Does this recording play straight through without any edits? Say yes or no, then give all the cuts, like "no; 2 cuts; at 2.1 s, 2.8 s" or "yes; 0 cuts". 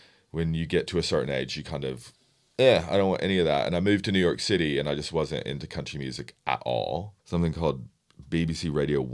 no; 1 cut; at 7.2 s